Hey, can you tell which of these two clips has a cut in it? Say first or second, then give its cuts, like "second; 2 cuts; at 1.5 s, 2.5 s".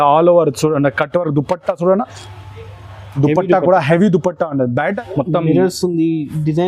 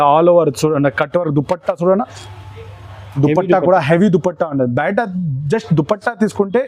first; 1 cut; at 5.0 s